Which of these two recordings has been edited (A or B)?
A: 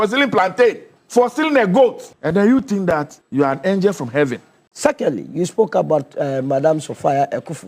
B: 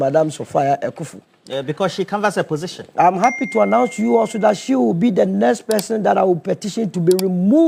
A